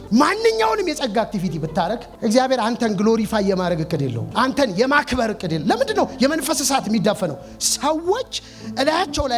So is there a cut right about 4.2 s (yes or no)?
yes